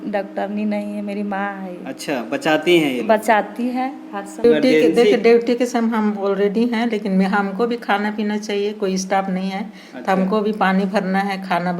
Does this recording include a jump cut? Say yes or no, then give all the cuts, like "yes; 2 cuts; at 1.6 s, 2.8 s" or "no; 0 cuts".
yes; 1 cut; at 4.4 s